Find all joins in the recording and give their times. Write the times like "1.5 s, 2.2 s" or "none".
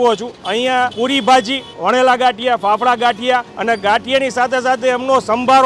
1.2 s, 3.5 s